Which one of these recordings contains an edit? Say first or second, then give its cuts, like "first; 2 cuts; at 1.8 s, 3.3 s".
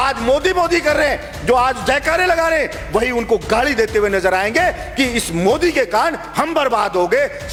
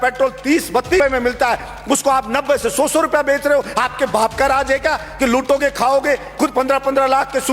second; 1 cut; at 1.0 s